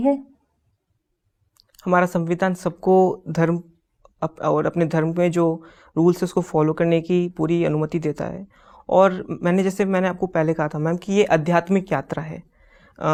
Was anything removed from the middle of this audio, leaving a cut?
no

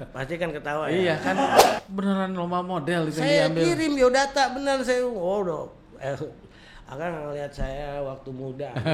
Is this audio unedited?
no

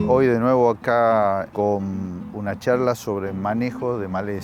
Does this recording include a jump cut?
yes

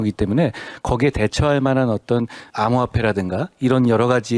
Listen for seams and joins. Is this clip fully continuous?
no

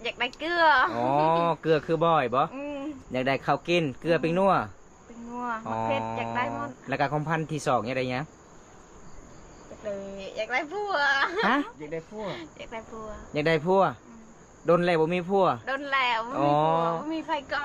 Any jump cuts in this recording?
no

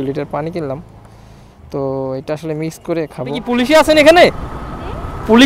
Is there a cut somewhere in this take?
yes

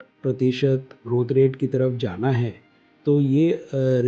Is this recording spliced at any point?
no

